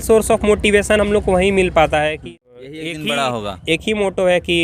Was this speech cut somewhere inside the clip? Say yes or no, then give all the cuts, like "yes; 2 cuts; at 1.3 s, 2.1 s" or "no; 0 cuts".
yes; 1 cut; at 2.2 s